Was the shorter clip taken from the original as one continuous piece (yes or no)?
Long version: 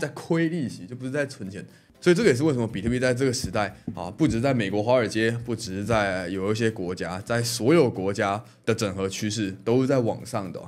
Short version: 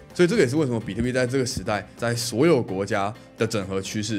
no